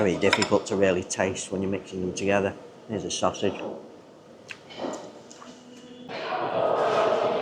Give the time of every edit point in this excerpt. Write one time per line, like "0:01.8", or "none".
0:06.0